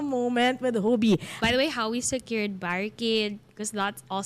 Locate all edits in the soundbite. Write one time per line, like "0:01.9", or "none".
0:01.3